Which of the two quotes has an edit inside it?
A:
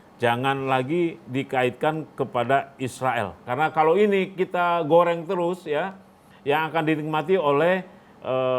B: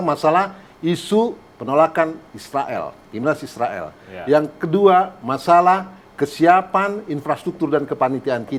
A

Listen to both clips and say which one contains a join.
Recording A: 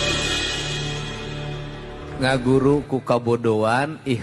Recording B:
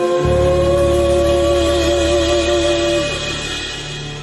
A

